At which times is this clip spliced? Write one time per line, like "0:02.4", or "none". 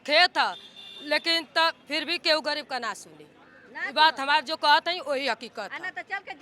none